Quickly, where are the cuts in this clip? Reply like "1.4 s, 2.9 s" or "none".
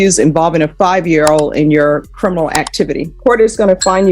3.1 s